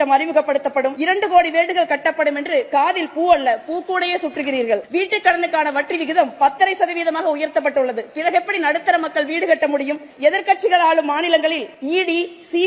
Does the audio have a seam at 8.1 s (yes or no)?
no